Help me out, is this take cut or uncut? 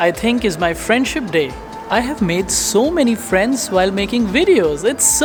uncut